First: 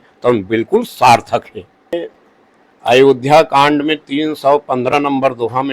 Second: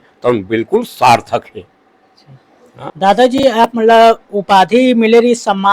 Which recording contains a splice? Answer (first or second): first